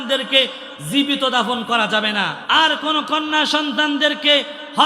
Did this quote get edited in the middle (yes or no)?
yes